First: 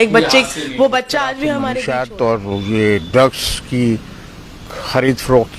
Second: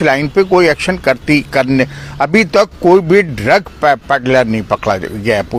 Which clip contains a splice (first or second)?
first